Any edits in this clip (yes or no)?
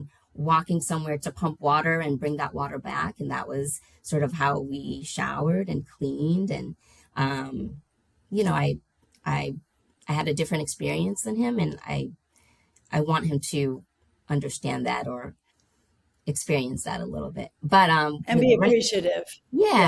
no